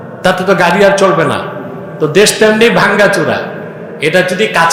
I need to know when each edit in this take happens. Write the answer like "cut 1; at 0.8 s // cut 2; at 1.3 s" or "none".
none